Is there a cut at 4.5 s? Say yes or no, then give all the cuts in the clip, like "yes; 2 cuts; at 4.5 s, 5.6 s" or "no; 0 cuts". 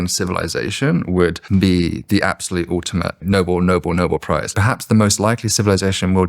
yes; 3 cuts; at 1.4 s, 3.2 s, 4.5 s